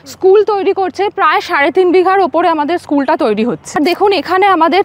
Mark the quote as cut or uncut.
cut